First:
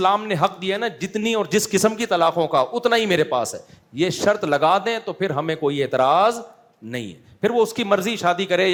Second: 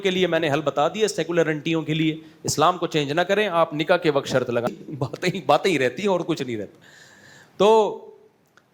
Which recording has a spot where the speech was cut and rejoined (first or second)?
second